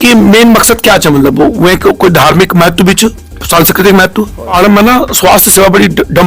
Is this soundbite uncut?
no; 1 cut; at 4.5 s

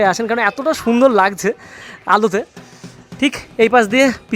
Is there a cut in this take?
no; 0 cuts

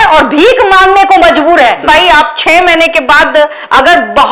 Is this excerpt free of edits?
no; 1 cut; at 1.8 s

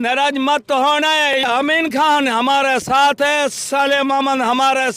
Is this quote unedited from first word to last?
no; 1 cut; at 1.3 s

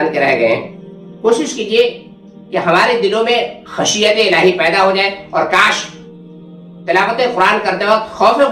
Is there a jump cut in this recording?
no; 0 cuts

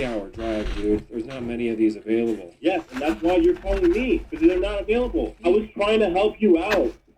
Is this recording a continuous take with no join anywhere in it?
no; 2 cuts; at 2.5 s, 5.3 s

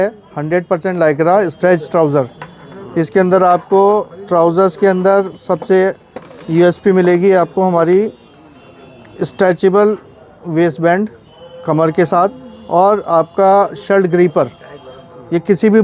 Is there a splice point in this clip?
no; 0 cuts

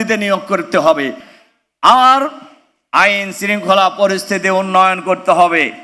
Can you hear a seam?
yes; 1 cut; at 1.3 s

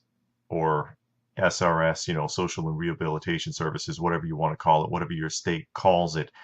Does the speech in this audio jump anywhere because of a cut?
yes; 1 cut; at 2.0 s

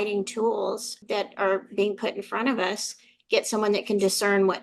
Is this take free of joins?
no; 1 cut; at 0.9 s

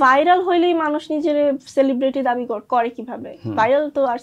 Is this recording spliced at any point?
no; 0 cuts

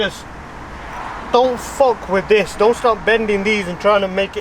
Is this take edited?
no; 0 cuts

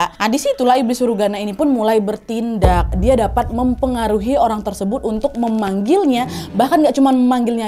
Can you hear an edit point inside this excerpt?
yes; 1 cut; at 2.9 s

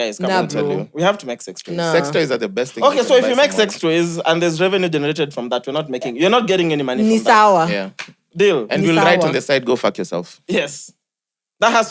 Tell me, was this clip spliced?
no; 0 cuts

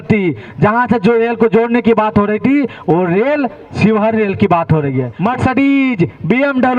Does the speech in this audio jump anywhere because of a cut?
yes; 1 cut; at 5.1 s

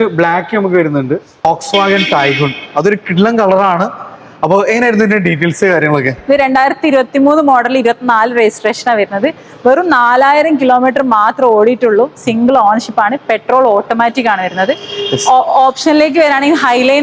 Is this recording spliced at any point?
no; 0 cuts

